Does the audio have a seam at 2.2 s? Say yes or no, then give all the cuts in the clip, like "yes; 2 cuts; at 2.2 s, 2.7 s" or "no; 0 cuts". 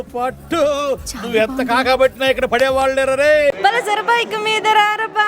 no; 1 cut; at 3.6 s